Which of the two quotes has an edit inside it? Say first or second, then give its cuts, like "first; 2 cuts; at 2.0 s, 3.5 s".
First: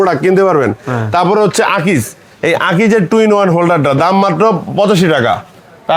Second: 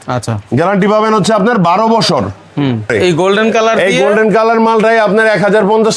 second; 1 cut; at 2.9 s